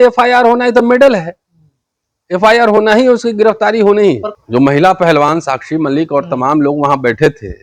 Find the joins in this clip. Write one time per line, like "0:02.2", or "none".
0:04.3